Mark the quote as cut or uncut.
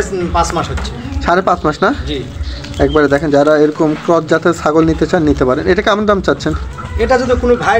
uncut